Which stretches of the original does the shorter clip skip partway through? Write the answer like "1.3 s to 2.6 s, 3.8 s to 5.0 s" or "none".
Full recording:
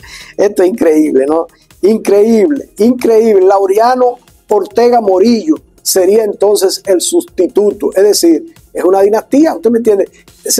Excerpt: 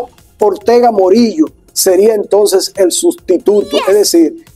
none